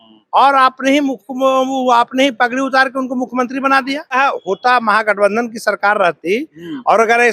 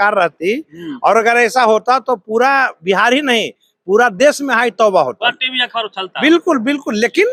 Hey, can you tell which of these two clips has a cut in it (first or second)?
first